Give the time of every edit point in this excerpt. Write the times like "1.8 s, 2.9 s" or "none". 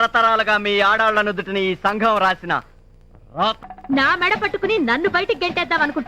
3.6 s